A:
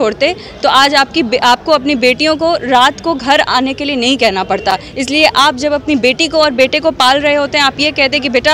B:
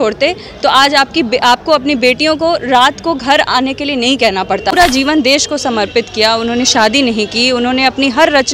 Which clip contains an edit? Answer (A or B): B